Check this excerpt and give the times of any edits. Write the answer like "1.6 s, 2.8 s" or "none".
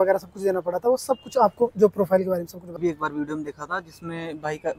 2.8 s